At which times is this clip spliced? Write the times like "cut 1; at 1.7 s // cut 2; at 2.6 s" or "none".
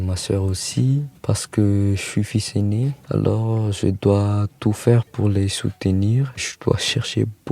cut 1; at 1.1 s // cut 2; at 3.0 s // cut 3; at 5.1 s

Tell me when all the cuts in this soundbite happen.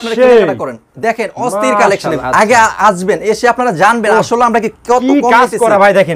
cut 1; at 2.2 s

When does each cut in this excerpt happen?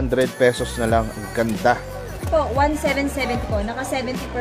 cut 1; at 2.2 s

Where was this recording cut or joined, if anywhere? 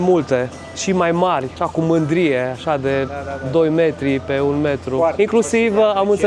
cut 1; at 5.1 s

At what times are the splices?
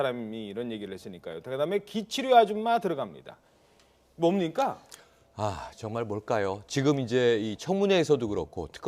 cut 1; at 6.4 s

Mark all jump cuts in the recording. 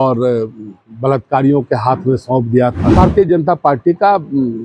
cut 1; at 2.8 s

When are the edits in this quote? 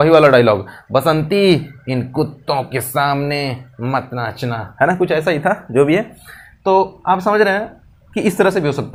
none

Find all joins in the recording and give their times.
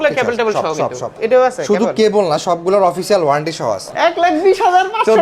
cut 1; at 1.2 s // cut 2; at 3.8 s

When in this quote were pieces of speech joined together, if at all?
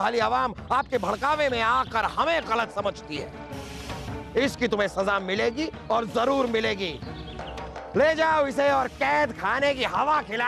none

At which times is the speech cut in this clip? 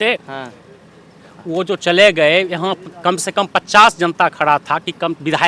none

